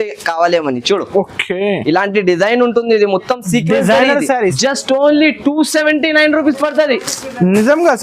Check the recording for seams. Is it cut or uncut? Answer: cut